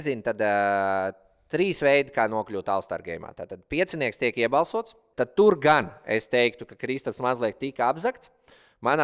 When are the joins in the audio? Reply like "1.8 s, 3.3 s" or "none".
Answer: 5.0 s